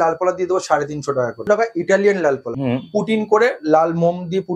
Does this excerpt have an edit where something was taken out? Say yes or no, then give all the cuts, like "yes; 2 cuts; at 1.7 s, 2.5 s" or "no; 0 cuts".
yes; 2 cuts; at 1.5 s, 2.5 s